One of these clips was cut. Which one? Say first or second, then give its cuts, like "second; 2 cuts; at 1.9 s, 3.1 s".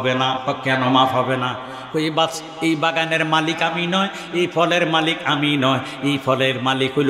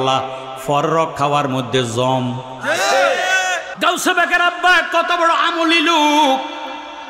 second; 1 cut; at 3.7 s